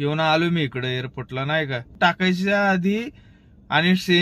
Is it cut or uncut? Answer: cut